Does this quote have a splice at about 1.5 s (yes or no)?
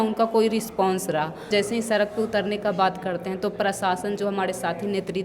yes